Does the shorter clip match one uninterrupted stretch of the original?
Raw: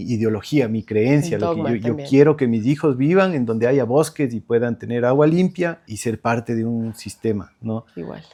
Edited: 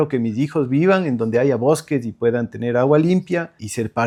yes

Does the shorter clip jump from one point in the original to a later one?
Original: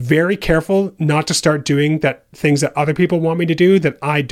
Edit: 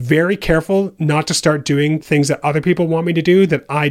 yes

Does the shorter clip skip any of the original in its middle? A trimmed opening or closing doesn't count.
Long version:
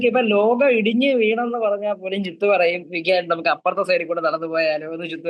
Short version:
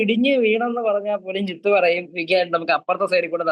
no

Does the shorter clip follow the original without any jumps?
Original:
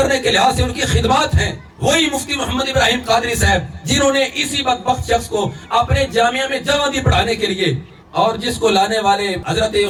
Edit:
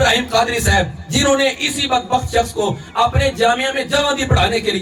yes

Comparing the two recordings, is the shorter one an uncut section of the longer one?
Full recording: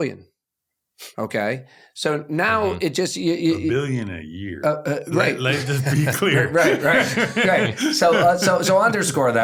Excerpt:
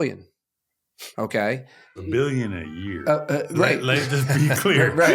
no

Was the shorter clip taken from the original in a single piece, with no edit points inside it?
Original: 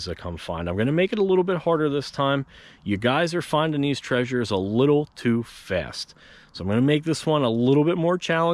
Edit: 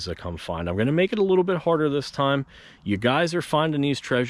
yes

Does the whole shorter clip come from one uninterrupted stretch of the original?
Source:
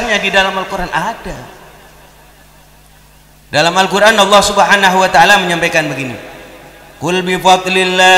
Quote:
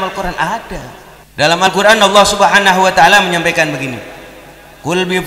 no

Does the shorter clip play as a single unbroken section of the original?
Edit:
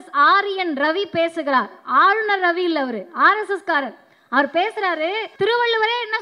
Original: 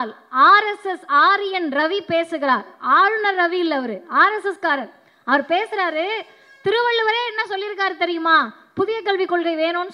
no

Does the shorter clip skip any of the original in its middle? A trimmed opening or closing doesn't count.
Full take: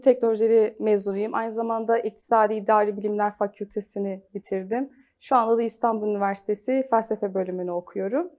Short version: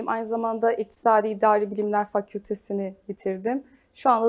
no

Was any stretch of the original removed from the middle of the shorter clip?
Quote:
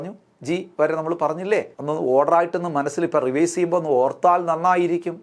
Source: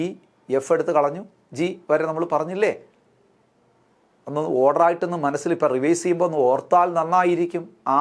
yes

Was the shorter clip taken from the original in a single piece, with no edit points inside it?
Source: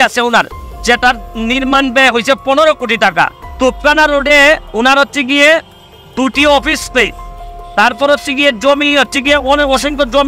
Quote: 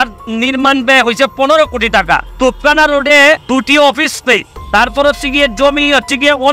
no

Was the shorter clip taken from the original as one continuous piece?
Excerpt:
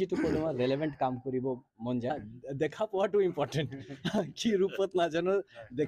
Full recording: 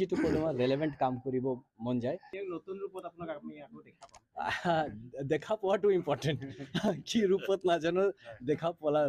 no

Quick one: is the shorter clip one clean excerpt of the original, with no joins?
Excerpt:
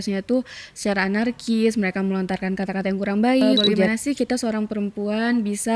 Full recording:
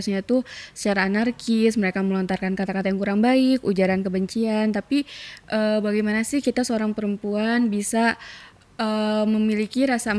no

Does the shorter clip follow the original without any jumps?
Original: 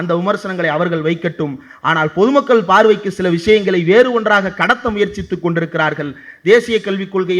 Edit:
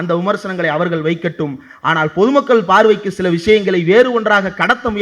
yes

